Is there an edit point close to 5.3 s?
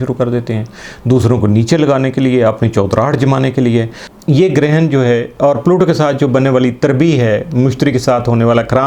no; 1 cut; at 4.0 s

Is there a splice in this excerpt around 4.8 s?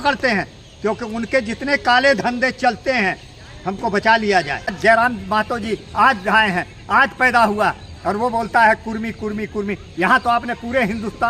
yes; 1 cut; at 4.8 s

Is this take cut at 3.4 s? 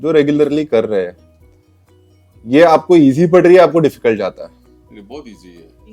no; 0 cuts

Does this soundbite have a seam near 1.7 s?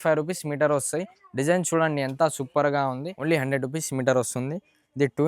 no; 1 cut; at 3.1 s

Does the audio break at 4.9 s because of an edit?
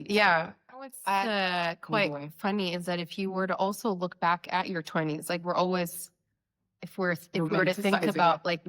no; 1 cut; at 1.2 s

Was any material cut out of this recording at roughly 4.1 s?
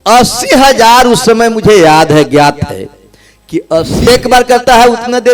yes; 1 cut; at 4.1 s

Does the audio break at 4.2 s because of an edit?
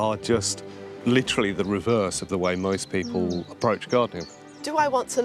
yes; 2 cuts; at 0.9 s, 4.2 s

